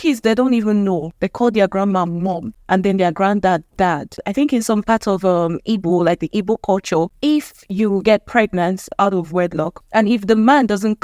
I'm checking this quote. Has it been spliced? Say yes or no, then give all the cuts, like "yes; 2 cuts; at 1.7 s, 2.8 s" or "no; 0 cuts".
yes; 6 cuts; at 1.2 s, 2.5 s, 4.2 s, 7.1 s, 8.9 s, 9.8 s